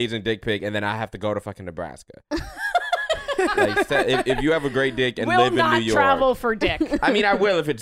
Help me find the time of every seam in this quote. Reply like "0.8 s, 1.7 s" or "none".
none